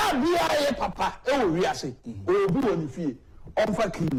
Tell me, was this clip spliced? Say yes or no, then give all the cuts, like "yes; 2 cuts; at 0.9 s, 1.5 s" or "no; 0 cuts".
no; 0 cuts